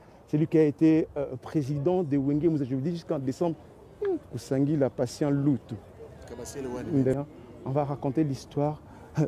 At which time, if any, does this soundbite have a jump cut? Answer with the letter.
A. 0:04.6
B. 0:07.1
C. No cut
B